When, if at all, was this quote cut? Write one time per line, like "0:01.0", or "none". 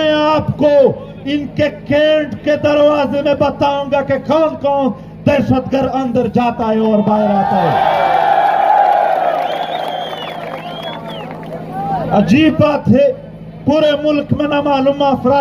none

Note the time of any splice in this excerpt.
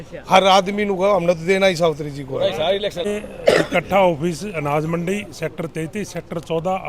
0:03.1

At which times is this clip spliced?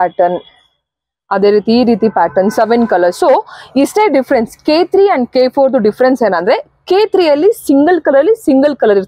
none

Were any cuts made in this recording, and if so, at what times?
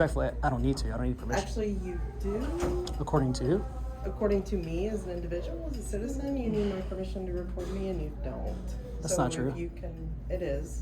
none

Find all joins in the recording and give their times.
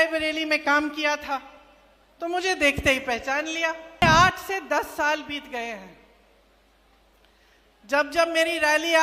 0:04.0

